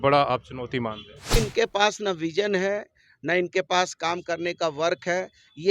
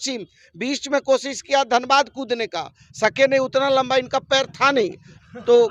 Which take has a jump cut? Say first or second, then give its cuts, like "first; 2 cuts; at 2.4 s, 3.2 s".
first; 1 cut; at 1.3 s